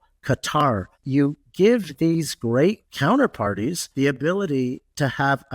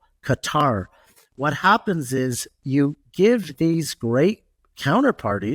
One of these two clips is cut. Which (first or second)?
first